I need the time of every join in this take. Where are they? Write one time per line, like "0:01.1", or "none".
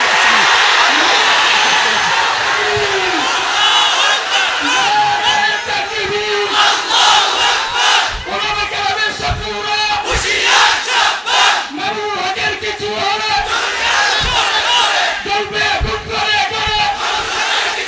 none